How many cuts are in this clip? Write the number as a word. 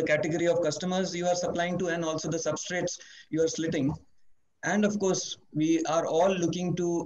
zero